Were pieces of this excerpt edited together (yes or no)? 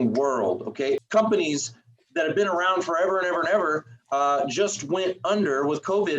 yes